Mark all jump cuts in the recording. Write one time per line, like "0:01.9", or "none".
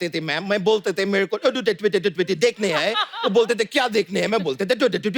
none